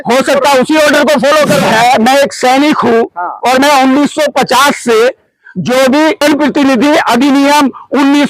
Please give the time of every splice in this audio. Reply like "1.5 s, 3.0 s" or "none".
1.6 s, 6.2 s